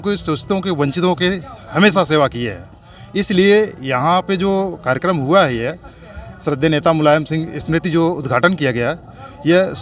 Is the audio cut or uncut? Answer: uncut